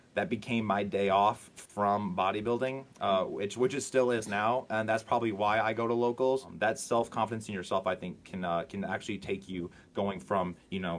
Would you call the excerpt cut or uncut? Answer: cut